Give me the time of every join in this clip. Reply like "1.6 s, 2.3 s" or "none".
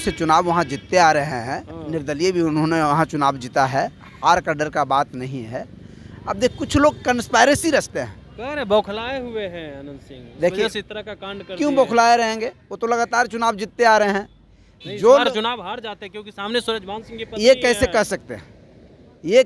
none